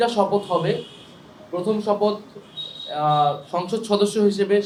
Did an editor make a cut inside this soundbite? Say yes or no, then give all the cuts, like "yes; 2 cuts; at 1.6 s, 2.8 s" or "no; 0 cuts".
no; 0 cuts